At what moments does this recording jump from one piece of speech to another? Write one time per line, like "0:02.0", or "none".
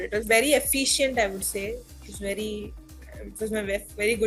none